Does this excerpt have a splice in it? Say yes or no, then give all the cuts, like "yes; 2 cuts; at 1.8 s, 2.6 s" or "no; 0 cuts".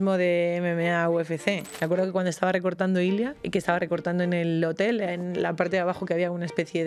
yes; 2 cuts; at 1.7 s, 3.4 s